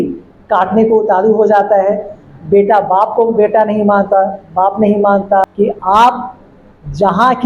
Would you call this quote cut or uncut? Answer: cut